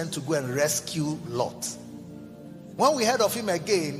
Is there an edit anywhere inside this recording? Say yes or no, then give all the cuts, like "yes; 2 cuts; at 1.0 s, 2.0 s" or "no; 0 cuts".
no; 0 cuts